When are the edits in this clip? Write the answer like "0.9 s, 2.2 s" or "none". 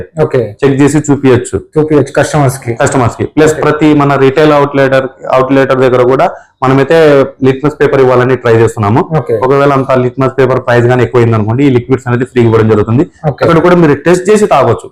none